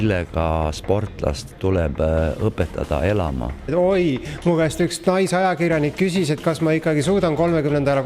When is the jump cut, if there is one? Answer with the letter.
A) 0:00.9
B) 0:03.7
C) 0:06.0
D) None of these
B